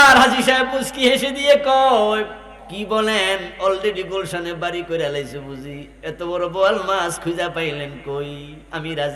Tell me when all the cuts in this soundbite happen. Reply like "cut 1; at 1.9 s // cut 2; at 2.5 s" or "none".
none